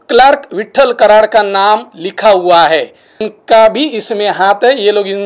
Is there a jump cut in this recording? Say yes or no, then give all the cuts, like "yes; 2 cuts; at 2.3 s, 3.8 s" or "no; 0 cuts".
yes; 1 cut; at 3.0 s